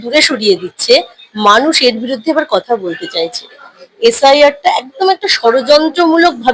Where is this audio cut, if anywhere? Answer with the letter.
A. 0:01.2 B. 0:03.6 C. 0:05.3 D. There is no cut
B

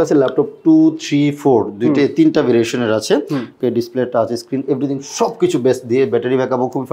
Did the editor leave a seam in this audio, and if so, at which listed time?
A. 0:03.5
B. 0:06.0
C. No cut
A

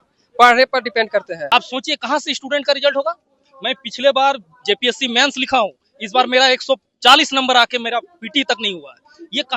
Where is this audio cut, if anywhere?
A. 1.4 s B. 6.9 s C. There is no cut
A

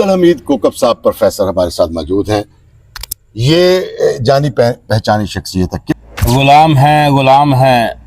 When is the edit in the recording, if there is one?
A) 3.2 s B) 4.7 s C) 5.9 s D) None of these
C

